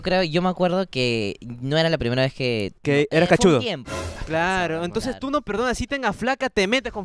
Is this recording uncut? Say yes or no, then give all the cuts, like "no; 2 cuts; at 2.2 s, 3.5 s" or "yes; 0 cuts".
no; 1 cut; at 3.9 s